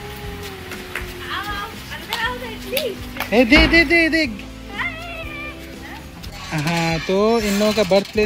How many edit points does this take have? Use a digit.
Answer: 1